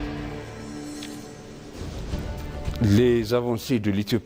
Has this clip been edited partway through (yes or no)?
no